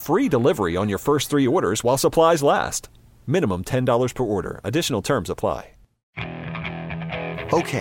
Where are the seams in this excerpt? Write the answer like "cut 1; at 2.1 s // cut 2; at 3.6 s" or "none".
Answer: cut 1; at 6.0 s